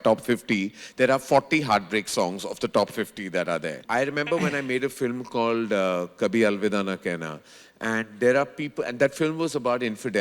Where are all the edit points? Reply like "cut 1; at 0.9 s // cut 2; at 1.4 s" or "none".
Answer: cut 1; at 3.8 s